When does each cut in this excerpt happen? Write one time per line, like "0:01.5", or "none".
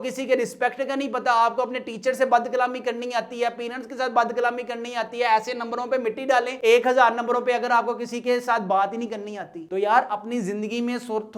none